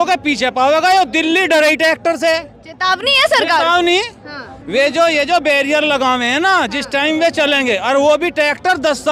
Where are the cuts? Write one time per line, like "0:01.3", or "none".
none